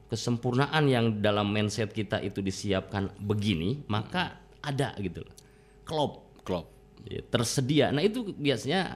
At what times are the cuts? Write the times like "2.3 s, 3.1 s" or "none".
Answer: none